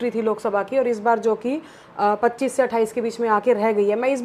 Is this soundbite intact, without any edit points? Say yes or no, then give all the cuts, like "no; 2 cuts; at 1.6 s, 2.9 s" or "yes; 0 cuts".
yes; 0 cuts